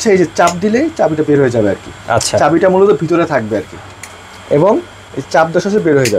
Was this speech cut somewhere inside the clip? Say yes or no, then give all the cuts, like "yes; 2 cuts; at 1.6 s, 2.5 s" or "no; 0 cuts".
no; 0 cuts